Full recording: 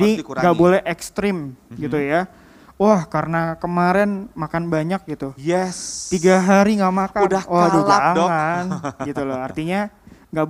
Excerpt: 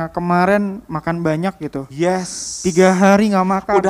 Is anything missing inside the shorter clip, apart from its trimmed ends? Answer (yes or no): no